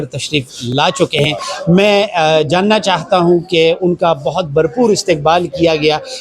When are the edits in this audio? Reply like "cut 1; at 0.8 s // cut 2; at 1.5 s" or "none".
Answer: none

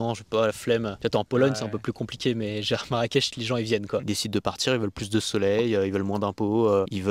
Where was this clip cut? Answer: cut 1; at 0.9 s // cut 2; at 4.0 s

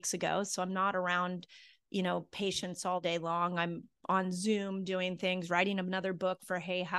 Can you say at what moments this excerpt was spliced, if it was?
none

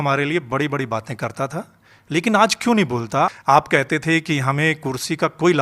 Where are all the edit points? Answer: cut 1; at 3.3 s

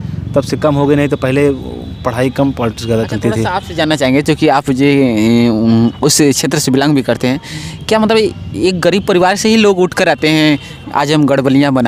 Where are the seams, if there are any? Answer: none

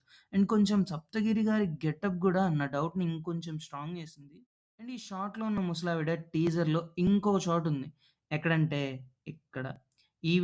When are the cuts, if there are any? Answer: cut 1; at 4.9 s

